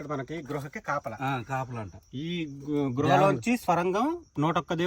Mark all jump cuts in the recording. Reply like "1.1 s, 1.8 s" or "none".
none